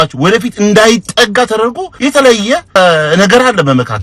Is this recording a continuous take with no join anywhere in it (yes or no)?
no